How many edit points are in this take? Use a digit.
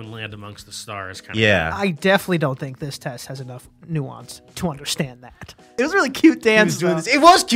1